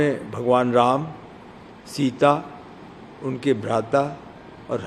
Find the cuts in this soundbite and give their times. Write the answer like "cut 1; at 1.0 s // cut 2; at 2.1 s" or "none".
none

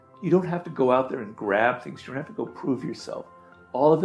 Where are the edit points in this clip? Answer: none

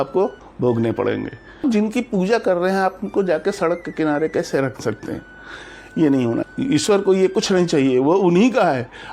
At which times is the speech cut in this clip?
cut 1; at 1.6 s // cut 2; at 6.5 s

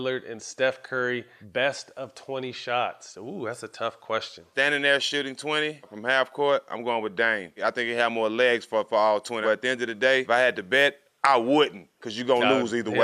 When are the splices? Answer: cut 1; at 1.4 s // cut 2; at 4.4 s // cut 3; at 6.0 s // cut 4; at 7.5 s // cut 5; at 9.7 s

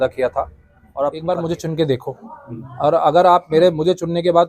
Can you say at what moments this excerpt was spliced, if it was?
cut 1; at 1.1 s

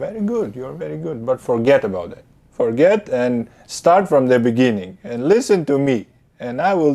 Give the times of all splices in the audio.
none

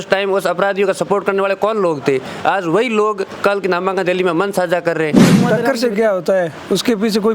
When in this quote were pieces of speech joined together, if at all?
cut 1; at 5.4 s

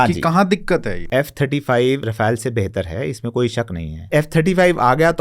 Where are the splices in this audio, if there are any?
cut 1; at 0.9 s // cut 2; at 2.1 s // cut 3; at 4.0 s

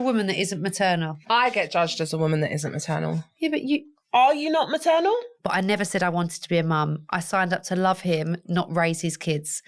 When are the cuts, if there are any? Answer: cut 1; at 1.2 s // cut 2; at 5.4 s

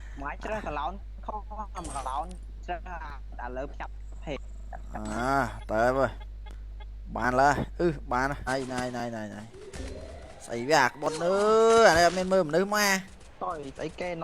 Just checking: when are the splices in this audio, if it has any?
cut 1; at 8.4 s

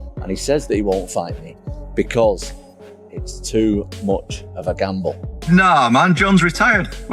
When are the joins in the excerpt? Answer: cut 1; at 5.3 s

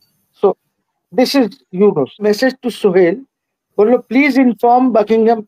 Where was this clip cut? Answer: cut 1; at 2.2 s

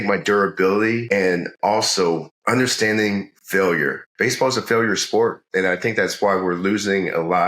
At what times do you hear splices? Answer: cut 1; at 1.1 s // cut 2; at 2.3 s // cut 3; at 4.0 s

